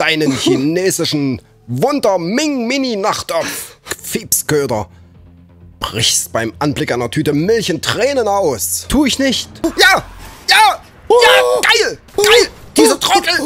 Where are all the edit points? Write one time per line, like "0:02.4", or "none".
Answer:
0:03.9
0:09.6